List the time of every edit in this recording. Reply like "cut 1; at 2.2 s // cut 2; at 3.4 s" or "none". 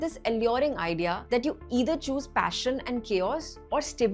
cut 1; at 1.2 s